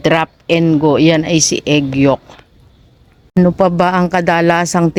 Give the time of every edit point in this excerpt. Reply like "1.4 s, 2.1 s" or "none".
none